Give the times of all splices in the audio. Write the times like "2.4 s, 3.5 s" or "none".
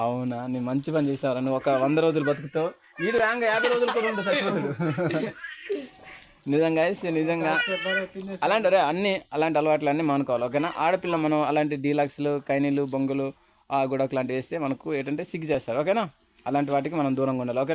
none